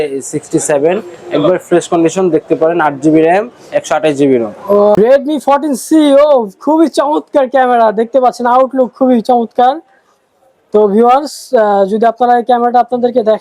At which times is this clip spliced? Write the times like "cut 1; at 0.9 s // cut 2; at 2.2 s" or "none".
cut 1; at 5.0 s